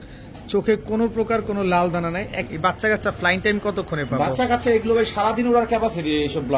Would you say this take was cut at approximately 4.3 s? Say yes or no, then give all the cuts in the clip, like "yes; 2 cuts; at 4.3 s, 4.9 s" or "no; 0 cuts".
no; 1 cut; at 2.4 s